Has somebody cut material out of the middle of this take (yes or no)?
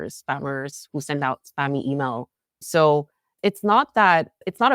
no